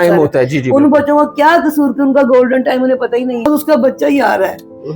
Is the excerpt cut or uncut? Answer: cut